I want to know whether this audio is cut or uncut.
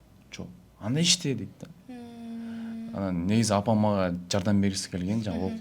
uncut